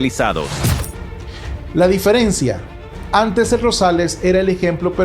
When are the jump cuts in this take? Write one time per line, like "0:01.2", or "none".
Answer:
0:01.0